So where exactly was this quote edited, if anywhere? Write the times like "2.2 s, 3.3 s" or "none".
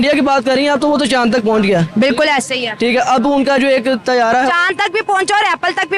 none